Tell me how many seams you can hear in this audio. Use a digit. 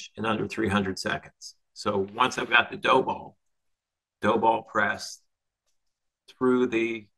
0